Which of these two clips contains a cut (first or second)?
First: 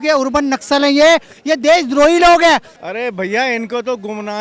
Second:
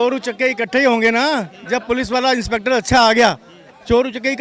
first